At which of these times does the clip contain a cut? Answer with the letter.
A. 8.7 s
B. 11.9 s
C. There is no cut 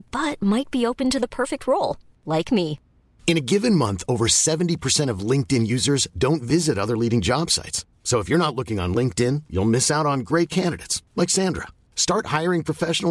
C